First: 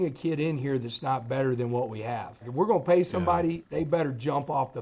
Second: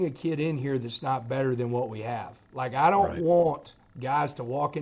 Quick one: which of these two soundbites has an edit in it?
first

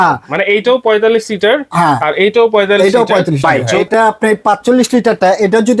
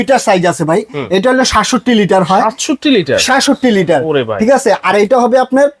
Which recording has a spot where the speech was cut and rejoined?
first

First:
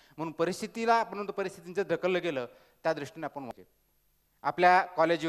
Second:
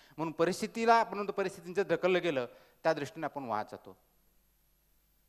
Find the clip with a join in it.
first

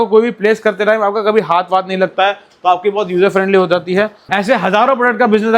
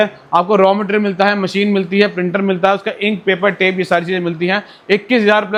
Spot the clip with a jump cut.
first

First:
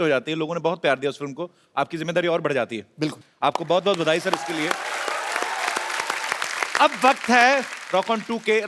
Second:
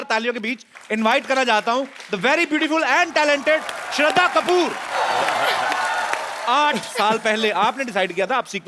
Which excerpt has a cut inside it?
second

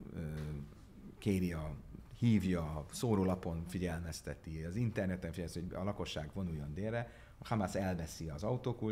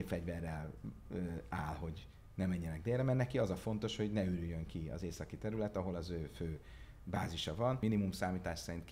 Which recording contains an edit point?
second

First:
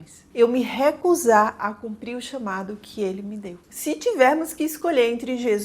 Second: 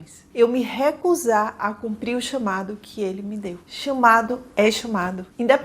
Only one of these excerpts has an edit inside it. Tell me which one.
first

